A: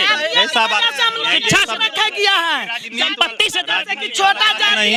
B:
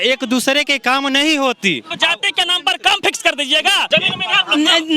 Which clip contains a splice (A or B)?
B